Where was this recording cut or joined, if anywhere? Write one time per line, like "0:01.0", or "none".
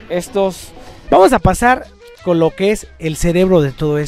0:00.9